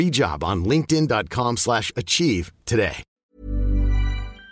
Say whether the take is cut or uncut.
cut